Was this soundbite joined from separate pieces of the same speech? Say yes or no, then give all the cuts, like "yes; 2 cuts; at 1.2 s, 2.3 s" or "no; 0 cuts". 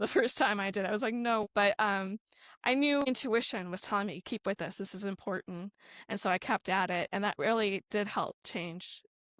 yes; 2 cuts; at 1.4 s, 3.0 s